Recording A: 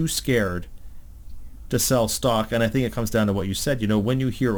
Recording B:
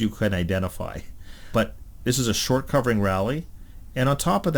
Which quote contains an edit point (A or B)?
B